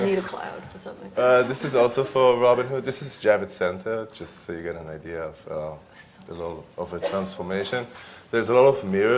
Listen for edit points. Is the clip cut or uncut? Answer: cut